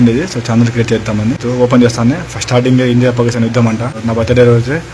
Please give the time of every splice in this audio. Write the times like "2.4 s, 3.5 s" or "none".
1.4 s, 3.9 s